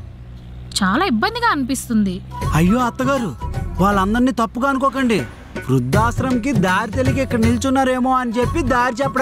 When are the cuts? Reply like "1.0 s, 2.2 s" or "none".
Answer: none